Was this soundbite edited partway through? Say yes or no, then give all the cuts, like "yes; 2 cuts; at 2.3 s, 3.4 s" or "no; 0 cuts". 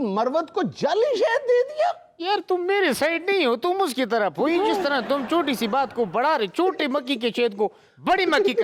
no; 0 cuts